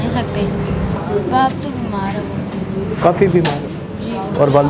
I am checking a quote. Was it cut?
yes; 1 cut; at 1.0 s

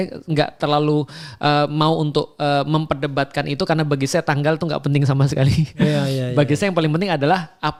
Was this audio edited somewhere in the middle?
no; 0 cuts

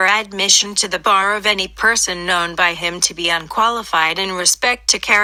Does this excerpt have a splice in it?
no; 0 cuts

